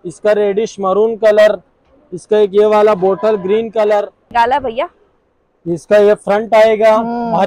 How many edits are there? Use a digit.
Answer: 1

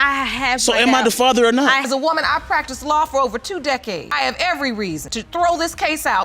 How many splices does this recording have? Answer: 3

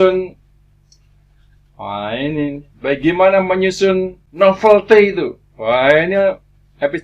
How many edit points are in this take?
1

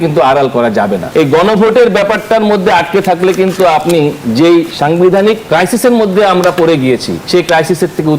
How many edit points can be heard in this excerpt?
4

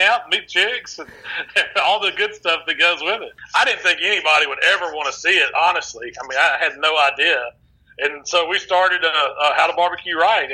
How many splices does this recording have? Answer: 1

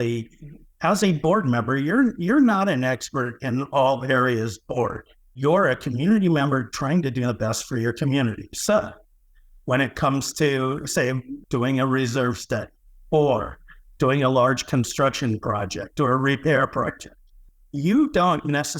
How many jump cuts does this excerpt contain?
2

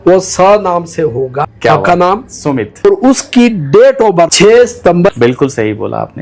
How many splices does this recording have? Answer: 4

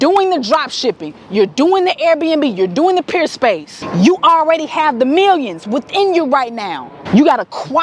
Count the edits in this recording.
2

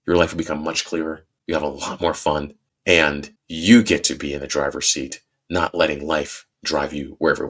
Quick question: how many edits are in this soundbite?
2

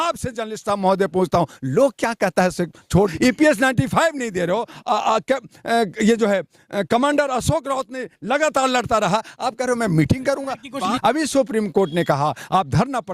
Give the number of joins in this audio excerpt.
2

